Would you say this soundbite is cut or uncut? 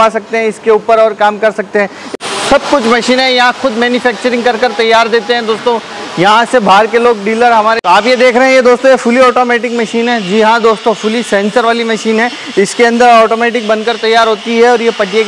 cut